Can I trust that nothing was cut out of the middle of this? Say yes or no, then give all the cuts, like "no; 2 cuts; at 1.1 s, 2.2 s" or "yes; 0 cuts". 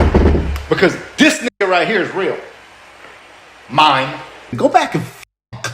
no; 1 cut; at 4.5 s